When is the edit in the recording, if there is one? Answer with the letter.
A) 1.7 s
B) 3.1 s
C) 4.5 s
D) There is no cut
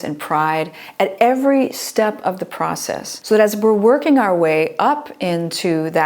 B